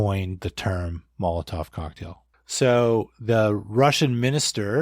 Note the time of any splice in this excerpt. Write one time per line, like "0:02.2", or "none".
0:02.5